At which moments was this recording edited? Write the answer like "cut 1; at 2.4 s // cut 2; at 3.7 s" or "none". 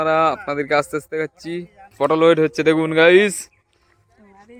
cut 1; at 1.8 s